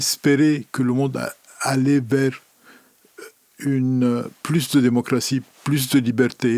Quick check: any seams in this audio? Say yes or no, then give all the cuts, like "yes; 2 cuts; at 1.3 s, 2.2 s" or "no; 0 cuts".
no; 0 cuts